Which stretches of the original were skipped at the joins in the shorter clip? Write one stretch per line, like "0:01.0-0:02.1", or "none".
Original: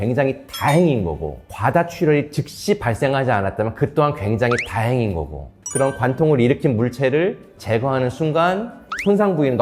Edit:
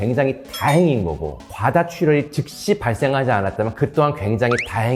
none